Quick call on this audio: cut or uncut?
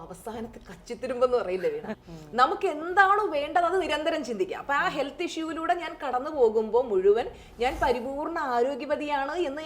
cut